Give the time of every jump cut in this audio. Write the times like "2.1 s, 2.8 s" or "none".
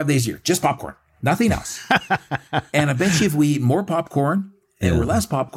none